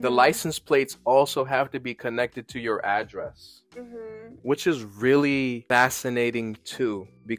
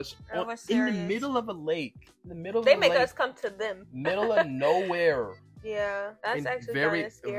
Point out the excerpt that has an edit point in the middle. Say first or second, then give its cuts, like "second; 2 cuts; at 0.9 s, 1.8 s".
first; 2 cuts; at 4.3 s, 5.6 s